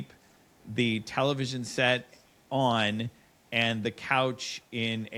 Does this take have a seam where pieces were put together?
no; 0 cuts

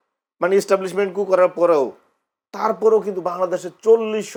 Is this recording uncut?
yes; 0 cuts

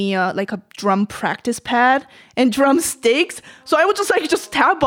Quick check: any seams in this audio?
no; 0 cuts

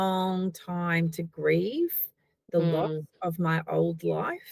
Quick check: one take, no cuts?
yes; 0 cuts

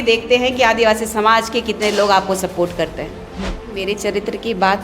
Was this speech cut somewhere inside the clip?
yes; 1 cut; at 3.7 s

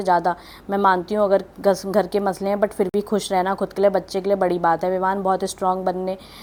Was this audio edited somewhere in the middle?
no; 0 cuts

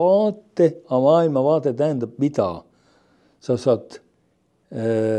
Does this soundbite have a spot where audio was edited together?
no; 0 cuts

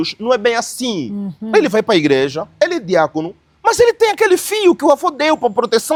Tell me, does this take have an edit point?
no; 0 cuts

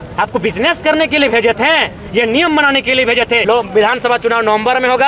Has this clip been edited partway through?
yes; 1 cut; at 3.4 s

